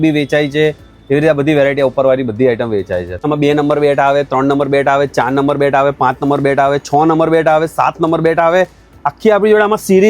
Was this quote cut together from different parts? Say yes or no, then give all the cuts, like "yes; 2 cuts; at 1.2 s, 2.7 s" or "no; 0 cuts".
yes; 1 cut; at 3.2 s